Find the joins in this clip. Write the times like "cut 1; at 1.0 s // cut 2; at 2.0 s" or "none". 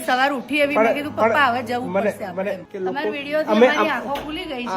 cut 1; at 2.6 s